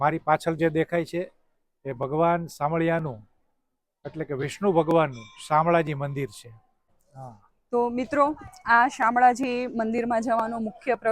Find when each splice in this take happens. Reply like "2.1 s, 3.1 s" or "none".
7.2 s